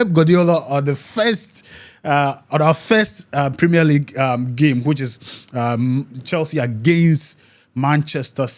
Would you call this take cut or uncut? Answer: uncut